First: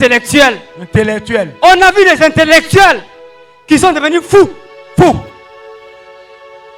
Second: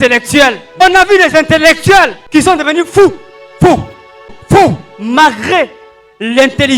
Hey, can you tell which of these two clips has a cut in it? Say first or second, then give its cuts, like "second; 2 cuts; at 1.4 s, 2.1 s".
second; 3 cuts; at 0.8 s, 2.2 s, 4.4 s